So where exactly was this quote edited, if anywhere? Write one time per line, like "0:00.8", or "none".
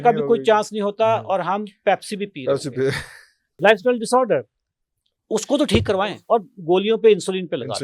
0:03.5
0:06.0